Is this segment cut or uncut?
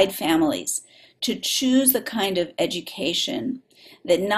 uncut